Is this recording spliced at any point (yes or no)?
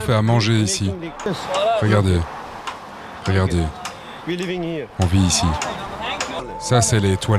yes